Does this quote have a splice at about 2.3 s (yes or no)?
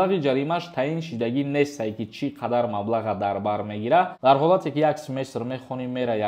no